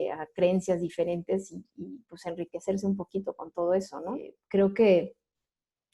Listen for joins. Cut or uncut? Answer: cut